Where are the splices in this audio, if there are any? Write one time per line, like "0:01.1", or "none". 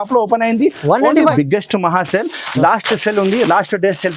0:01.3

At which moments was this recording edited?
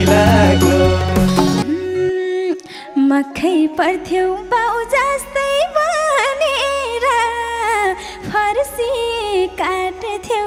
none

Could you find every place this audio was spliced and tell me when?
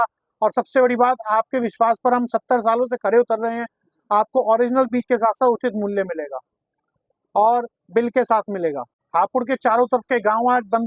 0:08.9

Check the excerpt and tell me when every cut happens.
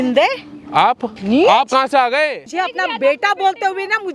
0:01.1
0:02.4

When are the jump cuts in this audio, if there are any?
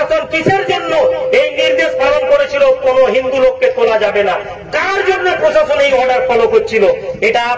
none

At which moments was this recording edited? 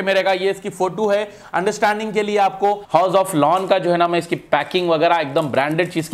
0:02.8

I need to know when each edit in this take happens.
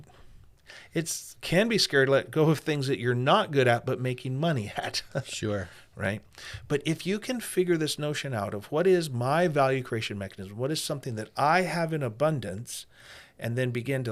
none

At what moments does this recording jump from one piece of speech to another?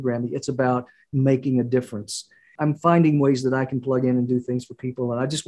0:02.5

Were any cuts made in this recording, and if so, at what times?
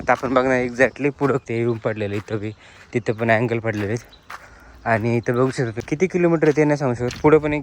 0:01.5
0:05.8

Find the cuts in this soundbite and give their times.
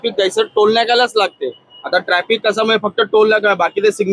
none

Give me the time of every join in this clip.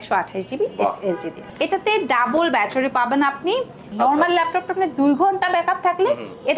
0:01.4
0:03.8

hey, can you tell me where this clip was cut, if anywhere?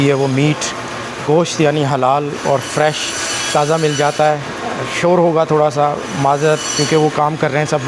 none

